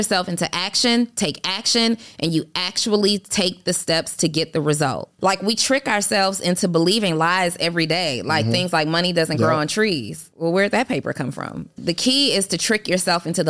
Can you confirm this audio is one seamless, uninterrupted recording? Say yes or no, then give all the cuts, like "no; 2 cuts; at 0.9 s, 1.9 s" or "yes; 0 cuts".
no; 3 cuts; at 5.1 s, 10.2 s, 11.8 s